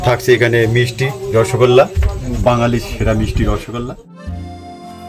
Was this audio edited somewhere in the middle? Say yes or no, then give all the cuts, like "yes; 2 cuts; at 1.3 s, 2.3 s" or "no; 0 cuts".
yes; 1 cut; at 4.0 s